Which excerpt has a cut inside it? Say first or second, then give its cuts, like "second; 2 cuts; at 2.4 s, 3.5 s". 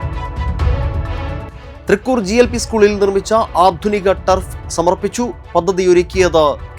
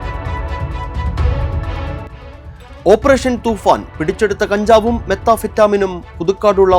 first; 1 cut; at 1.4 s